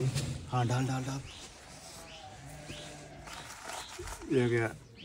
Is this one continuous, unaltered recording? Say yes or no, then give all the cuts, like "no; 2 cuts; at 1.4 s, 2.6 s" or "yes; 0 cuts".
yes; 0 cuts